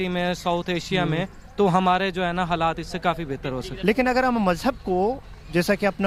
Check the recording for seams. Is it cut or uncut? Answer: cut